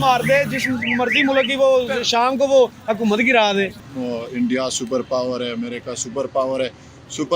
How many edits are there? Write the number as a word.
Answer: one